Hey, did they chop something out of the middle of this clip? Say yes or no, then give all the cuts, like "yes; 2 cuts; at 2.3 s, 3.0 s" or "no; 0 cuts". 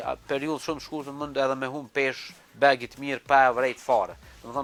no; 0 cuts